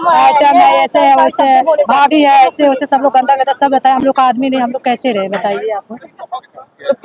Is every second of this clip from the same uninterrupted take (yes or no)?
yes